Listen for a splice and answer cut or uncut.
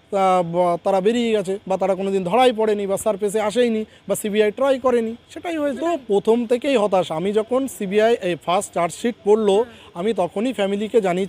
uncut